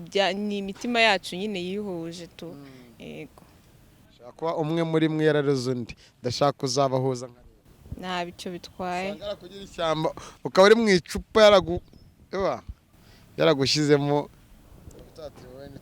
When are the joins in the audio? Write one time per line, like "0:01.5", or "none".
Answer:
0:04.1